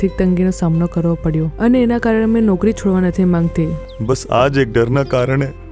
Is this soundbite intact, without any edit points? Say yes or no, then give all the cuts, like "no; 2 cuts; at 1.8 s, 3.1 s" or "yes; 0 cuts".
no; 1 cut; at 3.9 s